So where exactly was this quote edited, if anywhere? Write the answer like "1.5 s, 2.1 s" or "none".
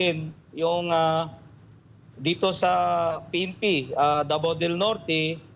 none